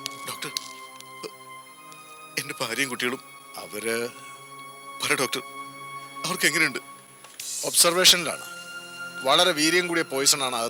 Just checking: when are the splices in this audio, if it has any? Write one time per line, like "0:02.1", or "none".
none

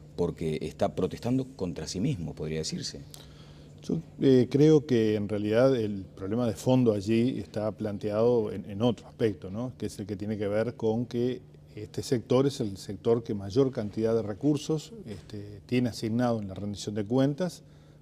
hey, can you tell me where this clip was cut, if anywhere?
0:13.7

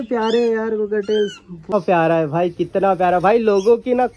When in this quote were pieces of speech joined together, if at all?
0:01.7

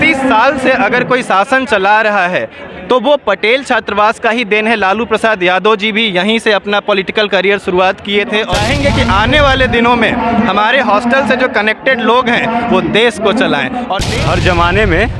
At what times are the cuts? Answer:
0:08.5
0:14.0

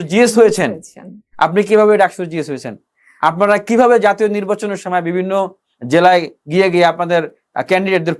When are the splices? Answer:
none

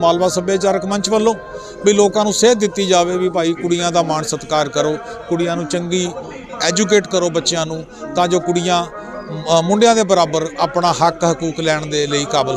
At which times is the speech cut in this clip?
none

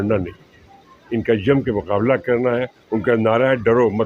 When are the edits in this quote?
none

